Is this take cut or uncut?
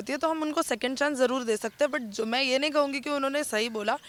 uncut